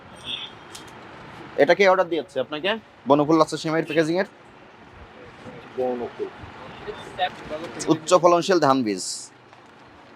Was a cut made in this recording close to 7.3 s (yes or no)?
yes